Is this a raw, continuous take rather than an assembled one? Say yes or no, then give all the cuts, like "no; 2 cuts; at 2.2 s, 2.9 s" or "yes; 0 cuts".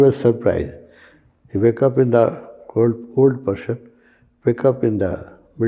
yes; 0 cuts